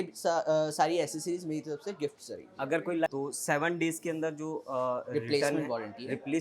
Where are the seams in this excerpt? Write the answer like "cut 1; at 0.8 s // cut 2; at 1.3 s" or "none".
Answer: cut 1; at 3.1 s